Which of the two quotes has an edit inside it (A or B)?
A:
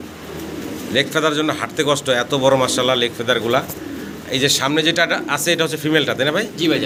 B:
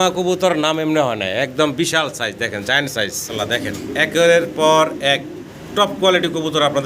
B